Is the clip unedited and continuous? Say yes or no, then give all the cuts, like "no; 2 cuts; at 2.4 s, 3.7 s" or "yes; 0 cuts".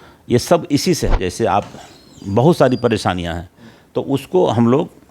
no; 1 cut; at 1.1 s